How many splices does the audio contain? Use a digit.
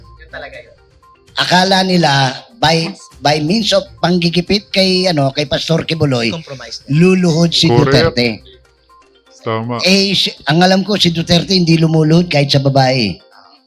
0